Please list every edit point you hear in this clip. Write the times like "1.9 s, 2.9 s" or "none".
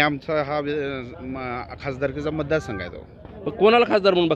none